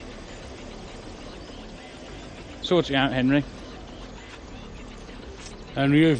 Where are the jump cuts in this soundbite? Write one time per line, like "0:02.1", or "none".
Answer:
none

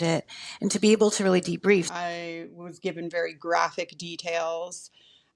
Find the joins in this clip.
0:01.9

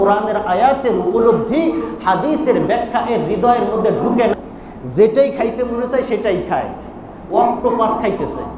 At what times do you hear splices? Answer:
0:04.3

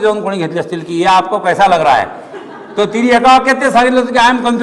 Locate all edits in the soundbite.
none

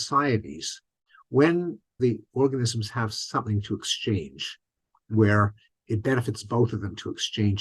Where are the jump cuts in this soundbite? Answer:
0:01.9

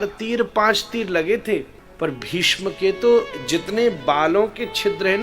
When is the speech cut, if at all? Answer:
0:01.8

